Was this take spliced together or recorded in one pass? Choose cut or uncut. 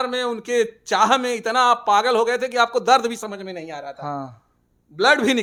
uncut